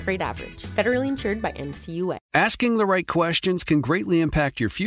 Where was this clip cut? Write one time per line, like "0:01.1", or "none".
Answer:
0:02.2